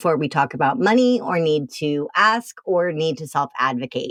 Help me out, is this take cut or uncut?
uncut